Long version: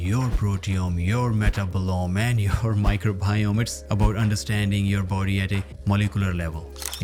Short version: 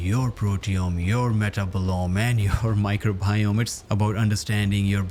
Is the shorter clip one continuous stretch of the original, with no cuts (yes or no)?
yes